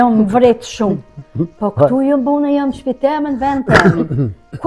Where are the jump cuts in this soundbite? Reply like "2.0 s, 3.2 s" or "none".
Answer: none